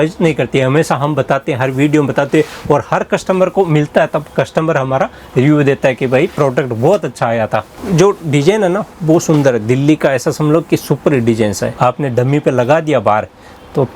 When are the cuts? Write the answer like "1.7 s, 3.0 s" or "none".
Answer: 7.8 s, 11.8 s